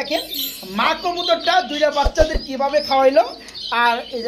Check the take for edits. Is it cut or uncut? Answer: uncut